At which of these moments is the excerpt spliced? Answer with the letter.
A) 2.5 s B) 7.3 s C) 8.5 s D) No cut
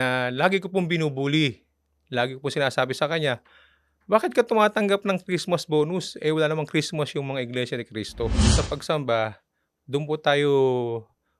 C